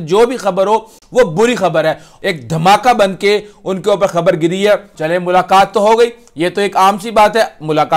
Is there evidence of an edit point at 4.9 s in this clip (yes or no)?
yes